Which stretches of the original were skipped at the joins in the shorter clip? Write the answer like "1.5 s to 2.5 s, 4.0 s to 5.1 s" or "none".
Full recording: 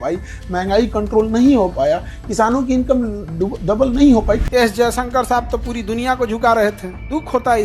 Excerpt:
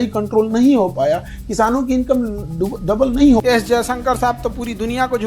4.2 s to 4.5 s